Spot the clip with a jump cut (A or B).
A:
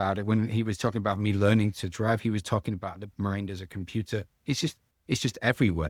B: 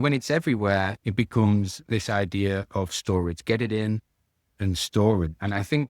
B